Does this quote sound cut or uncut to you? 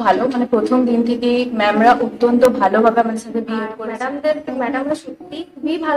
cut